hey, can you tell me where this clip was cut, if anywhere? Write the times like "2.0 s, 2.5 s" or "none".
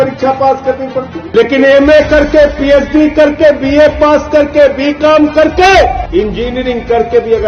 1.2 s, 6.0 s